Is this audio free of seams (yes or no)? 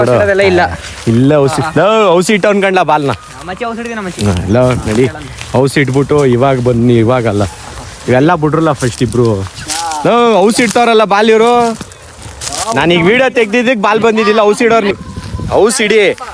no